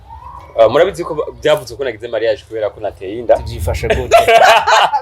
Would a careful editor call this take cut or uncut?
cut